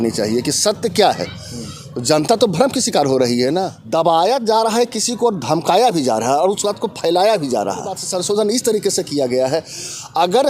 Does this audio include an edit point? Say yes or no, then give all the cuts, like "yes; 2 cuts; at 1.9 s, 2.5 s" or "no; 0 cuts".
yes; 2 cuts; at 3.8 s, 8.1 s